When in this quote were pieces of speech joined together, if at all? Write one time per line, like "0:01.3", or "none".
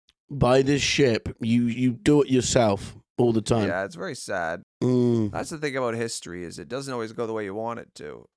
0:03.7